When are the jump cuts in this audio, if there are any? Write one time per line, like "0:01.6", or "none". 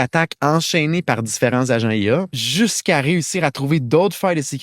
0:02.4